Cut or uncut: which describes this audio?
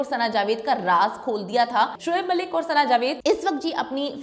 cut